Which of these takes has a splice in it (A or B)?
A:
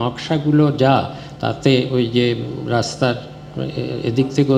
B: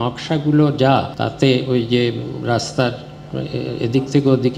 B